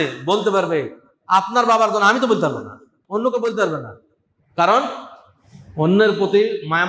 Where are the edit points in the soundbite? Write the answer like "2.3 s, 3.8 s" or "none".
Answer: none